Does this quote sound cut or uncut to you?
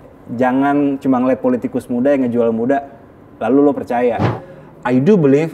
cut